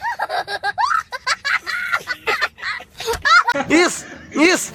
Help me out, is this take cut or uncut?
uncut